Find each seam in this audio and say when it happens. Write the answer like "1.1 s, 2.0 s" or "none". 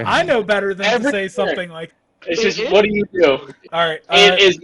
1.9 s, 3.6 s